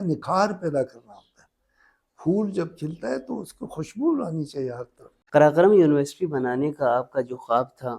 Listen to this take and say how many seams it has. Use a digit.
1